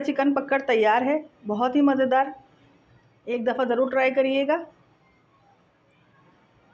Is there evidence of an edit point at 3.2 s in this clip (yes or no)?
no